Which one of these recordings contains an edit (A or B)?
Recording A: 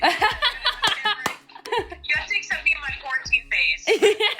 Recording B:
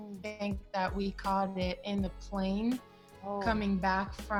A